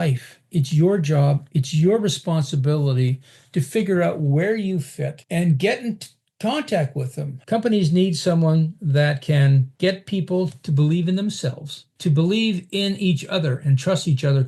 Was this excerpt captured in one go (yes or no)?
no